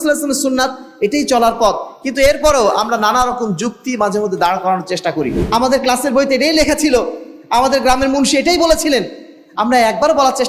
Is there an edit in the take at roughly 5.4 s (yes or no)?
yes